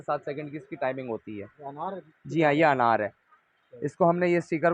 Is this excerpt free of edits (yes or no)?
yes